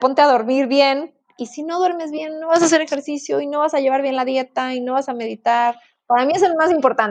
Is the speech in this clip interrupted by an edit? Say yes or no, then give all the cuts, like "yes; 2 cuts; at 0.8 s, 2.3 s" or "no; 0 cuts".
no; 0 cuts